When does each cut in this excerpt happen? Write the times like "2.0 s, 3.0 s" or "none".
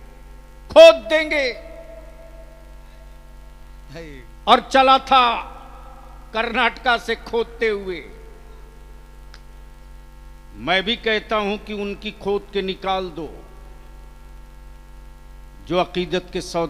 none